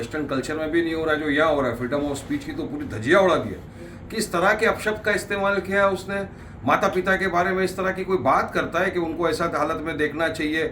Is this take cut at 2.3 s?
no; 0 cuts

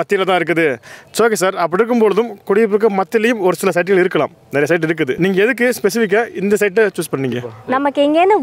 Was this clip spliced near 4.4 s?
no; 1 cut; at 7.5 s

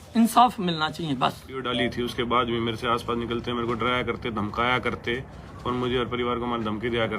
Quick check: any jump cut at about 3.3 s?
no; 1 cut; at 1.7 s

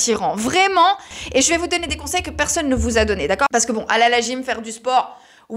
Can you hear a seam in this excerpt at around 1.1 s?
yes; 2 cuts; at 1.1 s, 3.7 s

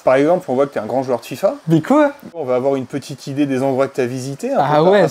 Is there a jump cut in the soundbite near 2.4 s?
yes; 2 cuts; at 1.6 s, 2.4 s

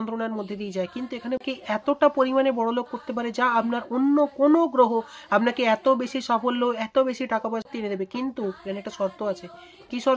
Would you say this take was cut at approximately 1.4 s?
yes; 2 cuts; at 1.4 s, 7.7 s

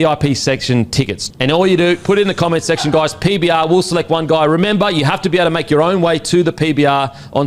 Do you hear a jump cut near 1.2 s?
yes; 1 cut; at 1.2 s

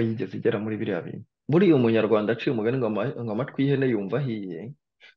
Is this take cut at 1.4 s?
yes; 1 cut; at 1.4 s

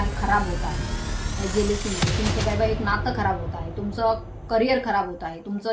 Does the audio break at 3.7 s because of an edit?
no; 0 cuts

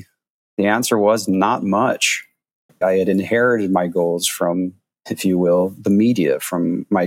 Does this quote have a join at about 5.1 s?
no; 1 cut; at 2.8 s

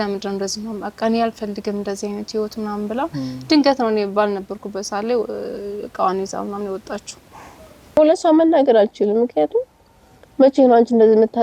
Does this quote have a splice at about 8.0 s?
yes; 1 cut; at 8.0 s

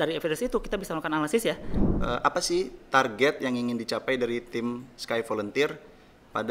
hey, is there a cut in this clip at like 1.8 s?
yes; 1 cut; at 1.8 s

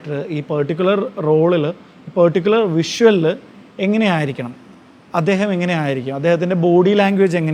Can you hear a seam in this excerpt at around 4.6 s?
no; 0 cuts

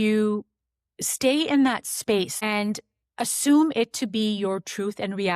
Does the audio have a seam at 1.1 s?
no; 1 cut; at 2.3 s

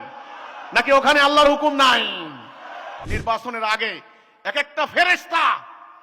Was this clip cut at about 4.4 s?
no; 1 cut; at 2.9 s

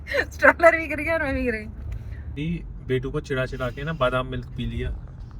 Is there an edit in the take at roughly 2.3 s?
yes; 1 cut; at 2.3 s

